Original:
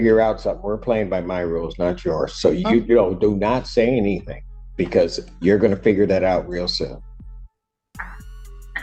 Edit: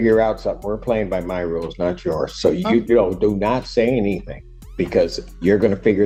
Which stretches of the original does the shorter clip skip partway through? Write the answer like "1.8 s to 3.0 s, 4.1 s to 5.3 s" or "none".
none

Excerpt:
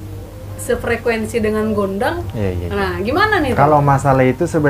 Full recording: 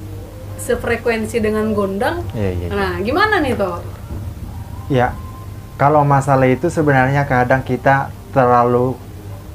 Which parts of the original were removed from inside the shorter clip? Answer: 3.6 s to 5.8 s

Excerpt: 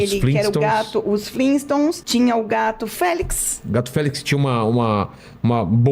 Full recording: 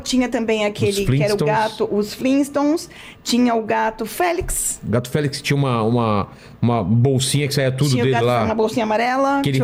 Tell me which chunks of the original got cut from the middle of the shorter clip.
2.9 s to 3.2 s

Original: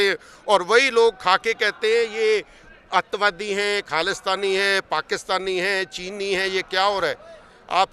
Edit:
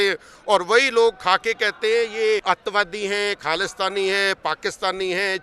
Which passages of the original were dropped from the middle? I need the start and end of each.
2.4 s to 2.9 s

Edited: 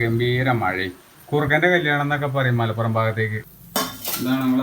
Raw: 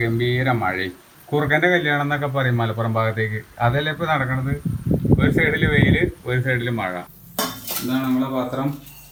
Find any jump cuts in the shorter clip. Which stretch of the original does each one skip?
3.4 s to 7.1 s

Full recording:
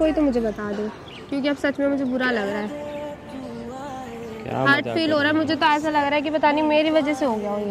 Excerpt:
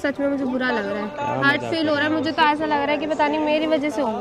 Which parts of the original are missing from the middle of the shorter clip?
2.8 s to 4.4 s

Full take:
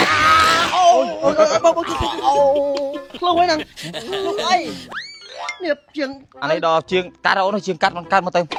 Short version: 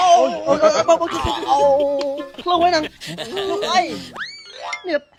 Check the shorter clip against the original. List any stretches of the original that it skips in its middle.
none

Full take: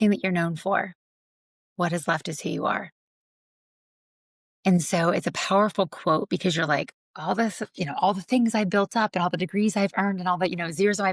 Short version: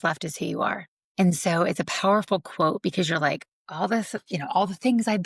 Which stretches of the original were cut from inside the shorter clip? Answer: 3.0 s to 4.4 s

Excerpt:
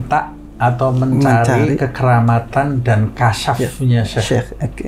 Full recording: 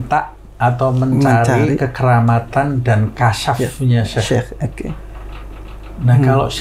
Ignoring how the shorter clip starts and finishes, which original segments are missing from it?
none

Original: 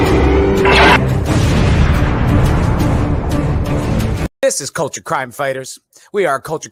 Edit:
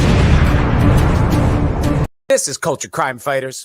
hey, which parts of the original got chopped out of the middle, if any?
3.6 s to 4.3 s

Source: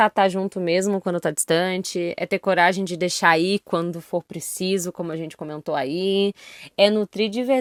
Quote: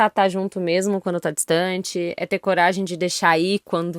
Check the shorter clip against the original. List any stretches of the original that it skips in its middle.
none

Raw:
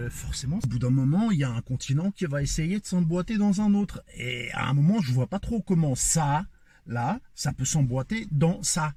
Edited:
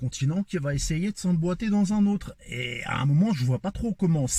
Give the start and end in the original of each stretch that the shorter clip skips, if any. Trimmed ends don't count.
none

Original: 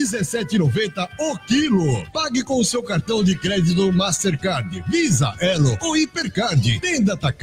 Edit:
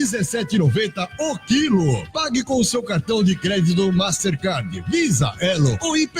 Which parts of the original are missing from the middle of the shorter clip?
none

